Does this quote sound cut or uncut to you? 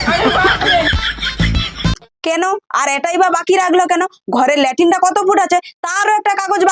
cut